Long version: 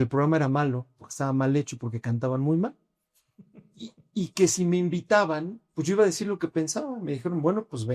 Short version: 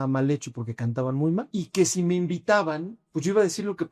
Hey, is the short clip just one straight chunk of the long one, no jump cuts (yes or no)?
no